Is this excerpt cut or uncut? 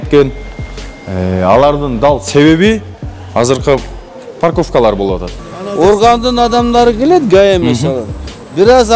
cut